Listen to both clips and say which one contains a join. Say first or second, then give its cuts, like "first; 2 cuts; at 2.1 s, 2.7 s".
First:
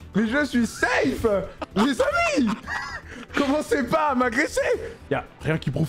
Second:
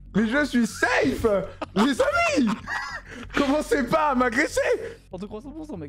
first; 1 cut; at 4.9 s